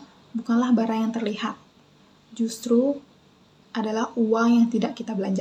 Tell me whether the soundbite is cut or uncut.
uncut